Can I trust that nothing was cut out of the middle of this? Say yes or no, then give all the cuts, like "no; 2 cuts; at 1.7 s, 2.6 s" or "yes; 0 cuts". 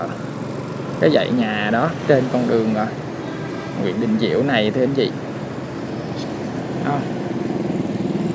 yes; 0 cuts